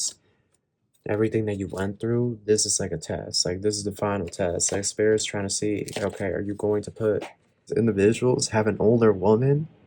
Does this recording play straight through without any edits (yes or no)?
no